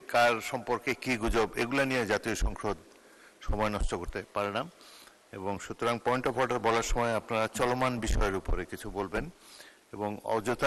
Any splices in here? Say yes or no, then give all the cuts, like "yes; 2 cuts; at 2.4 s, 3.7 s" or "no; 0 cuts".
no; 0 cuts